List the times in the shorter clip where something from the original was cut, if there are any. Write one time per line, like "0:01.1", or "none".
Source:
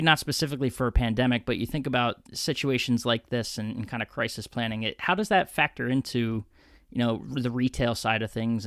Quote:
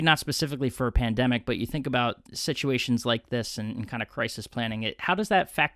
none